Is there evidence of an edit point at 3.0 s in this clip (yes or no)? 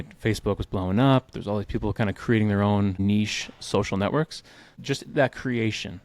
yes